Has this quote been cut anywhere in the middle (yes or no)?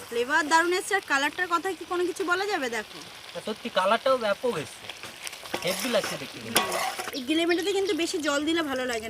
yes